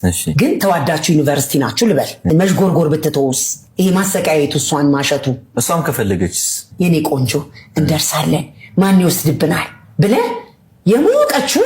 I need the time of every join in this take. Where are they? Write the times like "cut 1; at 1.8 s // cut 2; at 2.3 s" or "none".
cut 1; at 2.3 s